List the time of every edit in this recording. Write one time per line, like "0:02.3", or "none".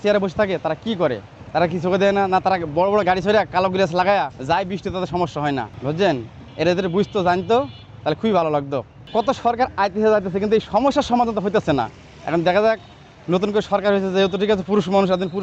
0:01.3
0:04.4
0:05.7
0:09.0